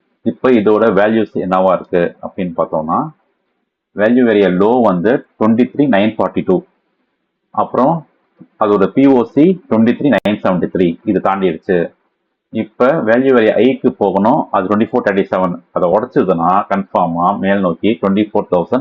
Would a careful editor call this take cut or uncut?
uncut